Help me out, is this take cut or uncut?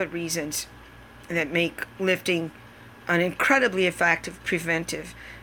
cut